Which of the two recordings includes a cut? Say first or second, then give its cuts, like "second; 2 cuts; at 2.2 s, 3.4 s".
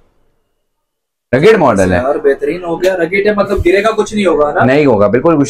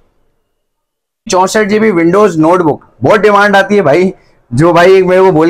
second; 1 cut; at 1.3 s